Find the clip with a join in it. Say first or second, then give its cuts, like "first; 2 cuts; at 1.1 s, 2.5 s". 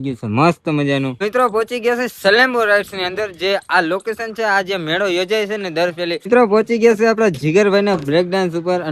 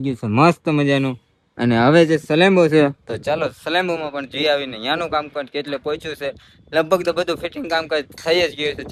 first; 2 cuts; at 1.1 s, 6.2 s